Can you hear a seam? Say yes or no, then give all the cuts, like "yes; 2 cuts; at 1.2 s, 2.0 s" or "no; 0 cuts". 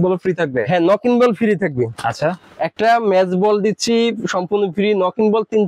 no; 0 cuts